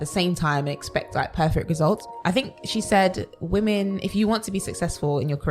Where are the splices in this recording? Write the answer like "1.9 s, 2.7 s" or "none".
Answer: 2.0 s